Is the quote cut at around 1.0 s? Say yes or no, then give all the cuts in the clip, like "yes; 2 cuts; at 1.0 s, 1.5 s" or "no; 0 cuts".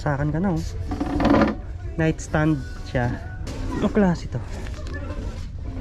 no; 1 cut; at 3.5 s